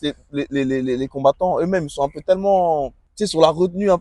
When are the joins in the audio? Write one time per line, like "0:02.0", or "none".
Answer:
0:03.0